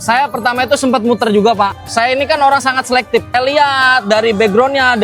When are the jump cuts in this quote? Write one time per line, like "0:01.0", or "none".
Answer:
0:01.8
0:03.3